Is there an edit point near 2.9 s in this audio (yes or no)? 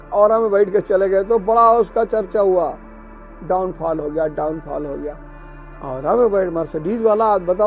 no